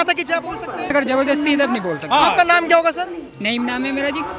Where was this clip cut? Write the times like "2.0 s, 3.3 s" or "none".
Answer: 0.9 s